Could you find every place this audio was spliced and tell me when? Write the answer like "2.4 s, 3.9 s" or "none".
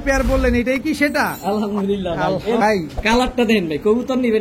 2.6 s